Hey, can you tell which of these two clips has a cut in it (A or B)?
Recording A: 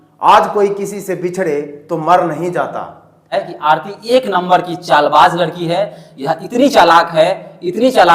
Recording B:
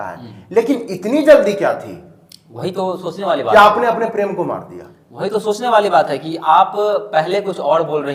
A